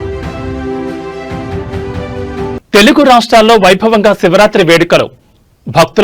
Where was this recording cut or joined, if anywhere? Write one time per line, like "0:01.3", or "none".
none

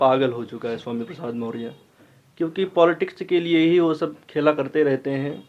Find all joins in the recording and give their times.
none

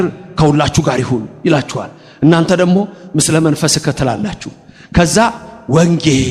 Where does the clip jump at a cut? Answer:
none

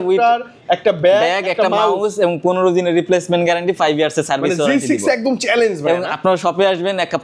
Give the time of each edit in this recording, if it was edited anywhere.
none

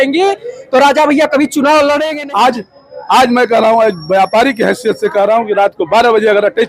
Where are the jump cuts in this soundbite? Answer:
0:02.1

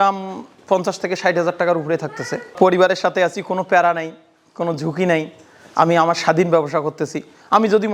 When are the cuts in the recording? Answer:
none

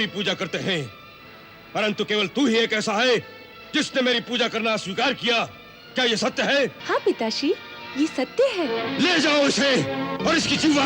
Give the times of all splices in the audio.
0:06.8
0:08.8

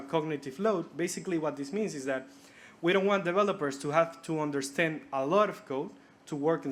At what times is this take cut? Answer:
none

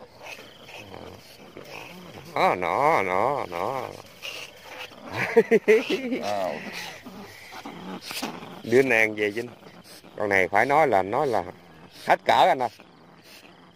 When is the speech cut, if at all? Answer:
none

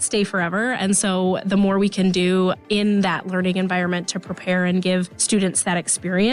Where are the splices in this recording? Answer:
0:05.2

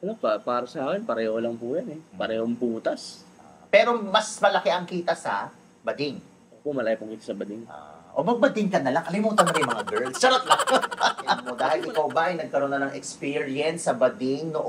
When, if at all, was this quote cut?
0:11.5

